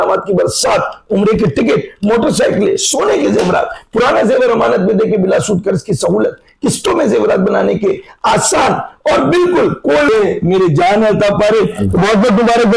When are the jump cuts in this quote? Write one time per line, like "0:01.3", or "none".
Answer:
0:10.1